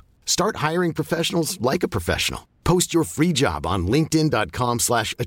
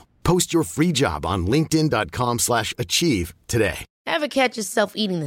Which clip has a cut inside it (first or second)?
second